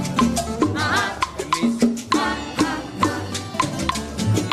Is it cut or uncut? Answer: uncut